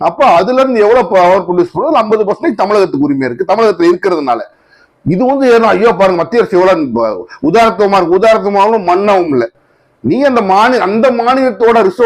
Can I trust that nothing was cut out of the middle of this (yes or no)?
yes